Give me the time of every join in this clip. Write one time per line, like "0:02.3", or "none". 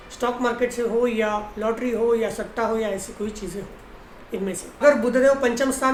none